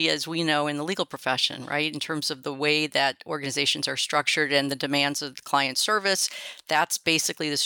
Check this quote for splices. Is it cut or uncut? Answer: uncut